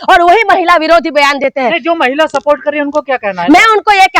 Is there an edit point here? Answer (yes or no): no